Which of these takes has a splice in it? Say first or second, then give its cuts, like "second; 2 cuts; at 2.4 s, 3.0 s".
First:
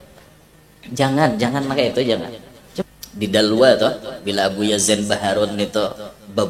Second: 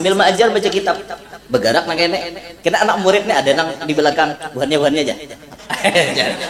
first; 1 cut; at 2.8 s